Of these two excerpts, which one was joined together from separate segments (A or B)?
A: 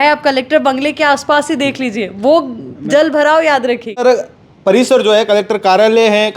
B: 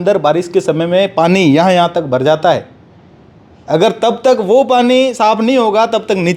A